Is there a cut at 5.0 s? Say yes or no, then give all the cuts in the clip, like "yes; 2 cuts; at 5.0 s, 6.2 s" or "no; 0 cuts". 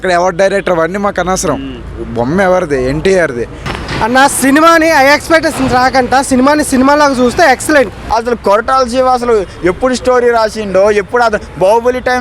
no; 2 cuts; at 3.6 s, 8.0 s